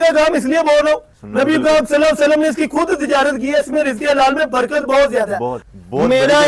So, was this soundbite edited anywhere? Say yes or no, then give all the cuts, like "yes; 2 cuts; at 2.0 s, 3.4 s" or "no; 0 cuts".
yes; 2 cuts; at 1.2 s, 5.6 s